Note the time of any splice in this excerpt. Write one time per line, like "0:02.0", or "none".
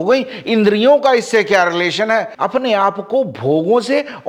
0:02.3